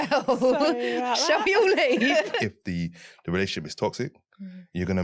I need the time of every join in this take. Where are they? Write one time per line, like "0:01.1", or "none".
0:02.3